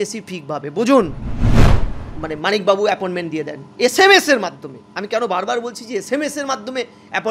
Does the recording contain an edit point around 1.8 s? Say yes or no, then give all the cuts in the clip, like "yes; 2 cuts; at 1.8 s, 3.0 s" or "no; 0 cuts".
yes; 1 cut; at 1.8 s